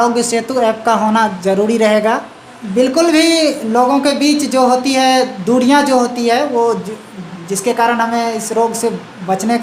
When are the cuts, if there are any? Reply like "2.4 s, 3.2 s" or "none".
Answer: 2.6 s